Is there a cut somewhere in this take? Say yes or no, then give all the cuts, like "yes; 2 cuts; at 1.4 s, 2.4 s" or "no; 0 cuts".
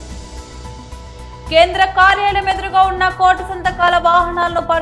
yes; 1 cut; at 1.5 s